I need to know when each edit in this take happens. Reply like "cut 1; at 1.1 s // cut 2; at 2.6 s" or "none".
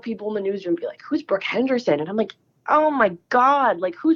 none